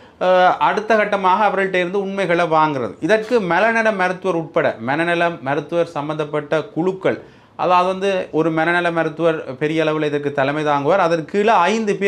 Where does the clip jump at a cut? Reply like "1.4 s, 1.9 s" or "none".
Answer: none